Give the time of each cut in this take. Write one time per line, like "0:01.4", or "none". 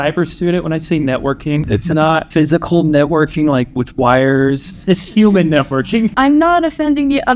0:01.7
0:04.7
0:06.1

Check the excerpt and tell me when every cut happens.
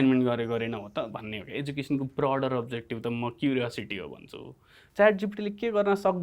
0:04.8

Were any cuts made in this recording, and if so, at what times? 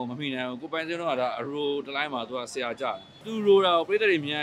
0:03.1

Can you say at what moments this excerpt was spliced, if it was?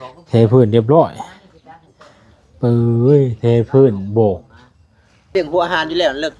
0:05.3

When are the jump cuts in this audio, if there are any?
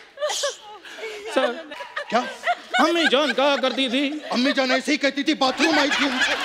0:01.7

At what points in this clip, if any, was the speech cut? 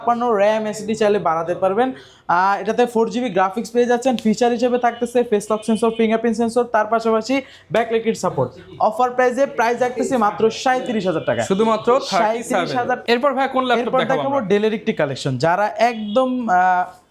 none

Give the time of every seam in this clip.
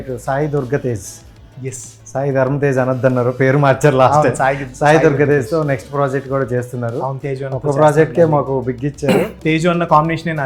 0:09.3

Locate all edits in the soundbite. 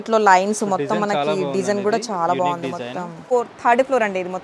0:03.3

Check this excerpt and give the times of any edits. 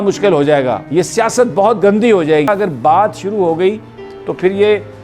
0:02.5

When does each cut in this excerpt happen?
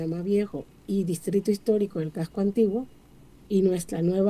none

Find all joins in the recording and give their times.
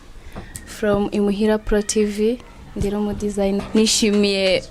0:03.6

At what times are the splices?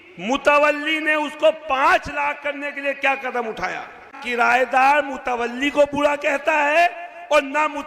0:04.2

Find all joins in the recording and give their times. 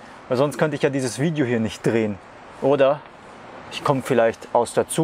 none

